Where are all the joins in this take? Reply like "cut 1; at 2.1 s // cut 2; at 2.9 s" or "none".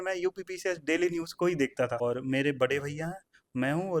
cut 1; at 2.0 s